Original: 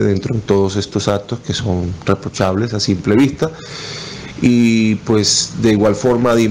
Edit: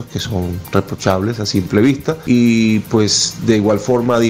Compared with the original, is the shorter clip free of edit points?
no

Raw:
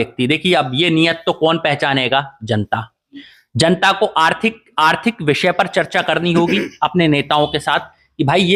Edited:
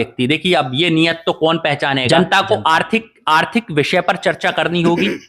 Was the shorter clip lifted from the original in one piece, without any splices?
no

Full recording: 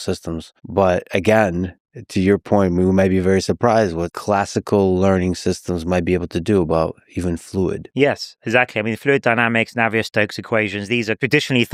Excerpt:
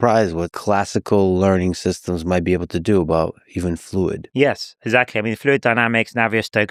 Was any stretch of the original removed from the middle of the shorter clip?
no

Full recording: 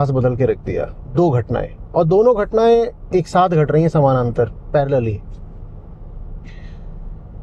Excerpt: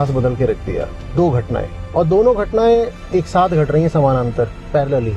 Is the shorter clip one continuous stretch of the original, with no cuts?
yes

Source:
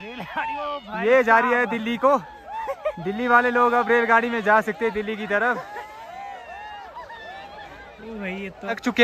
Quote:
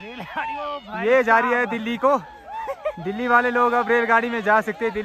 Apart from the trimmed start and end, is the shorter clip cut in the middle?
no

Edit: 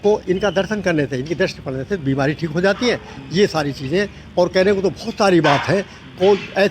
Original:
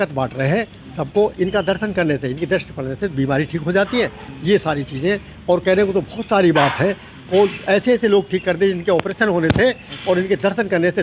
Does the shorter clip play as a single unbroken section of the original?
yes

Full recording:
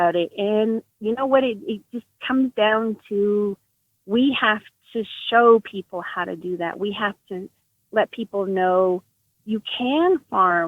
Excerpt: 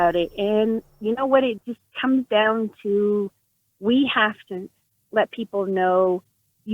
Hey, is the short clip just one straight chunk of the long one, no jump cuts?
no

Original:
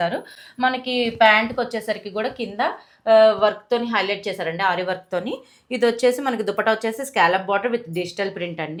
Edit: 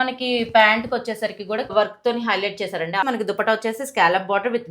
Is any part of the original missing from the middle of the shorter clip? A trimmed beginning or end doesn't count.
yes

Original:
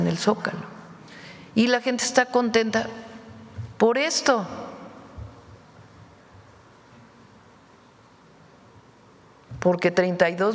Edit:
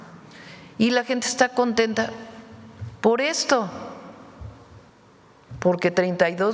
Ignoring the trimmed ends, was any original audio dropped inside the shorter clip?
yes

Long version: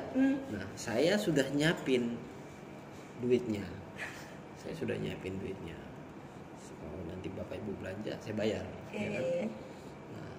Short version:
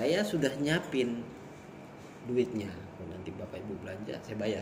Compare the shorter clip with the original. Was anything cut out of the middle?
yes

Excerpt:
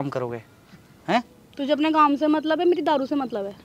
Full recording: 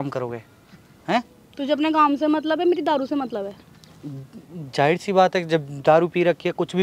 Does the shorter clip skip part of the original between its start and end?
no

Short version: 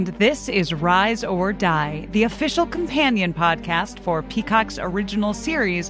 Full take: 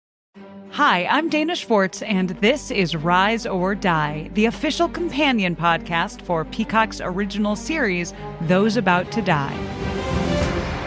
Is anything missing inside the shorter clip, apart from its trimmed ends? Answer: no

